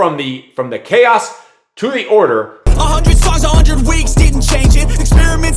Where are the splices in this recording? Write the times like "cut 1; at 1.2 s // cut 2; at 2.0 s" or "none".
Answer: cut 1; at 2.6 s